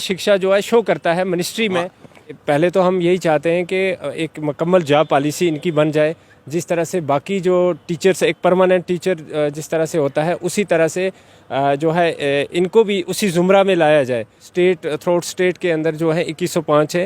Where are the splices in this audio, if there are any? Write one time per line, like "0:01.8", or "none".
0:02.4
0:14.5